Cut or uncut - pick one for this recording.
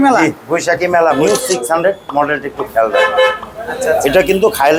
cut